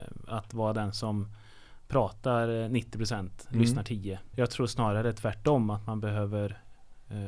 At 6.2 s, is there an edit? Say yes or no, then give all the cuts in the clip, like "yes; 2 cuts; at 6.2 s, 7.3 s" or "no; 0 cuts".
no; 1 cut; at 4.3 s